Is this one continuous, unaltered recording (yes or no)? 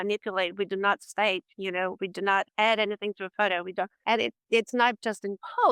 no